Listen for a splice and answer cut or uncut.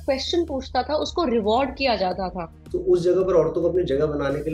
cut